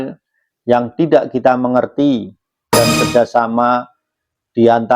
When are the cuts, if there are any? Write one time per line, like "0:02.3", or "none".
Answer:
0:02.7